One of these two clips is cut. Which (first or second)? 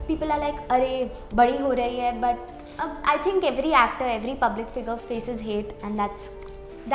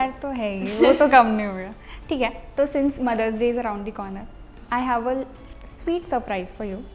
first